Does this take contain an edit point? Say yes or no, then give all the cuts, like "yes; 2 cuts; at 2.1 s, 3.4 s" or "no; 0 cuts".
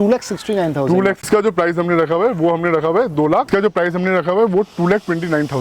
yes; 2 cuts; at 1.2 s, 3.5 s